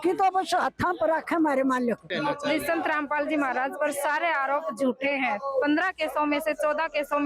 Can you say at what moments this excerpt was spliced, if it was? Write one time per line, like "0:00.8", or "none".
0:02.1